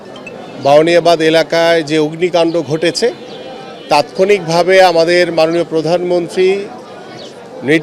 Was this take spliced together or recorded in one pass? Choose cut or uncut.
uncut